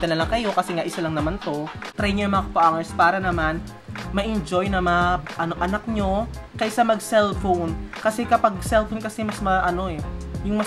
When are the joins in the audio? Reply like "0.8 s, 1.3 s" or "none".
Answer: 1.8 s